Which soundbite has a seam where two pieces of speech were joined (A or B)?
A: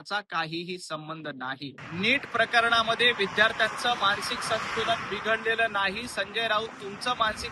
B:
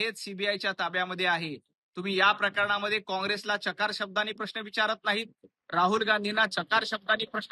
A